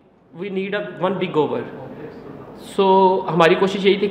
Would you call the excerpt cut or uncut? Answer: uncut